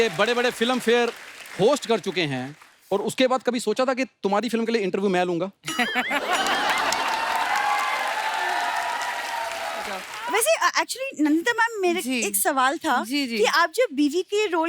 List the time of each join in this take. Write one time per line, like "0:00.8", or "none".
0:10.1